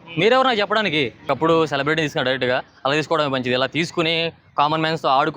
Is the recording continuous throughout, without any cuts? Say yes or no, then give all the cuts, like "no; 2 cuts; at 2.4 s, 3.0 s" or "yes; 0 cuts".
no; 1 cut; at 1.2 s